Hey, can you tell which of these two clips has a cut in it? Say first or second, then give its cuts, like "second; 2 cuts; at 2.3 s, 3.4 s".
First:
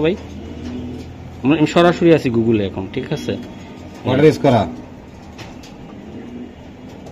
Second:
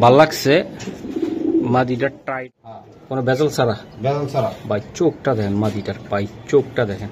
second; 1 cut; at 2.4 s